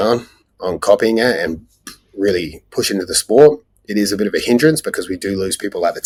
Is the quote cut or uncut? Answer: uncut